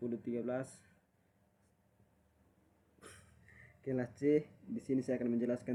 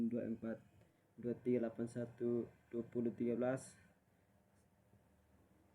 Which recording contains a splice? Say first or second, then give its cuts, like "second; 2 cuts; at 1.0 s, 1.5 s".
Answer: second; 1 cut; at 1.4 s